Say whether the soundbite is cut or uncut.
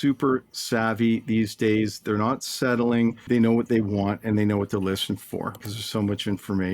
cut